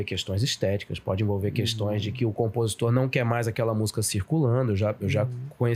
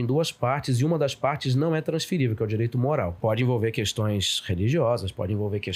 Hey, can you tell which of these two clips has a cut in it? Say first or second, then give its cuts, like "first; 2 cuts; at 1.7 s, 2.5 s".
second; 1 cut; at 3.1 s